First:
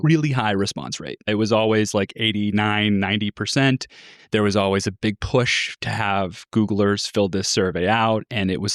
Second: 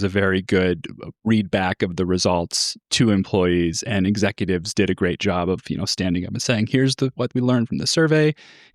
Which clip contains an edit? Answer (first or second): first